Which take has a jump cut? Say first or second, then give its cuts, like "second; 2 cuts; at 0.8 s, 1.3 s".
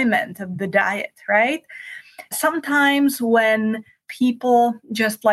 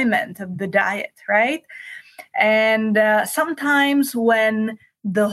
first; 2 cuts; at 2.3 s, 4.0 s